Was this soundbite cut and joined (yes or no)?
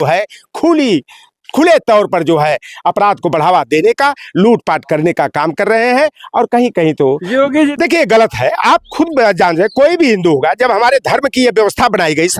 yes